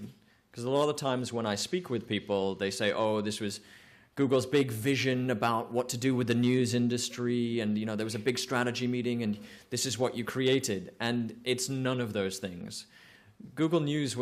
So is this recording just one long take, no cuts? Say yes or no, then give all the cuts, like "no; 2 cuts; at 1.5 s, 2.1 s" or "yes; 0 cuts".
no; 1 cut; at 3.0 s